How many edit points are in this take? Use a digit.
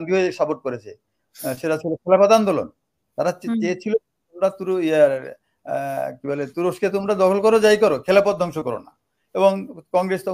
0